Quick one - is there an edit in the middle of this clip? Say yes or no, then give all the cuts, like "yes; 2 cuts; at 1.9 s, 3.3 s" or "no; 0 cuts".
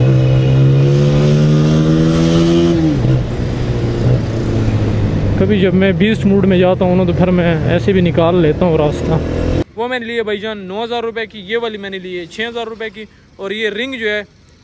yes; 1 cut; at 9.6 s